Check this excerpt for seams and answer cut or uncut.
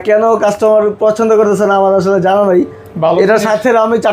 uncut